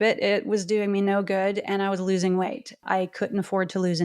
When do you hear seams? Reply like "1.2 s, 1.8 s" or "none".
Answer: 2.8 s